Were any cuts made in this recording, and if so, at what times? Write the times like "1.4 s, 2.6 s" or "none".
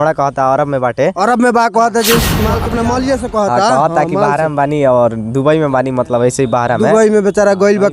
2.6 s

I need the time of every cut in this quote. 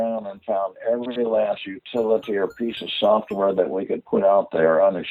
none

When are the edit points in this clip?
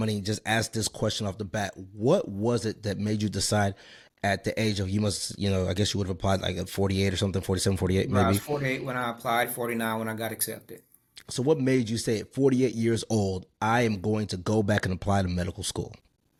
none

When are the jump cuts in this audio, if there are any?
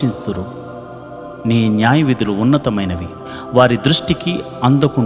none

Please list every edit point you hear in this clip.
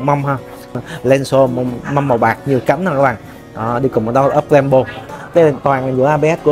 0.8 s, 5.1 s

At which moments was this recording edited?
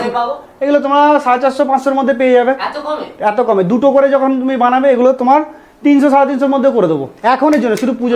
none

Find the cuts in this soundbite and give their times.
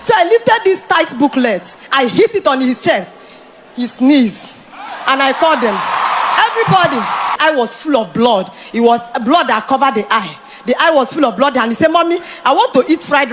7.3 s

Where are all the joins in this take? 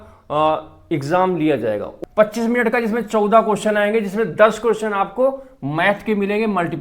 1.9 s

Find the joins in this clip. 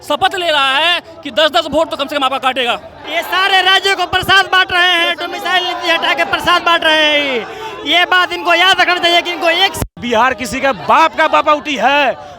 3.0 s, 9.9 s

